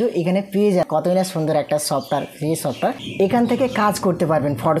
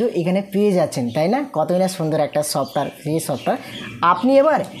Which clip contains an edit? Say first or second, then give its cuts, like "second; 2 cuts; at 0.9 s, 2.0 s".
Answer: first; 2 cuts; at 0.9 s, 3.0 s